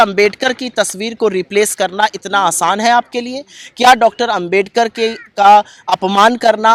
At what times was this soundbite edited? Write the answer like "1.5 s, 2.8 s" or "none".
none